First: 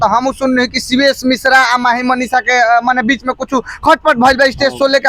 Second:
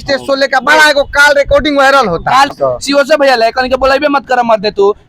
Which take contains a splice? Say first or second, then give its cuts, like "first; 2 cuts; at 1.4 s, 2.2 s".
second; 1 cut; at 2.5 s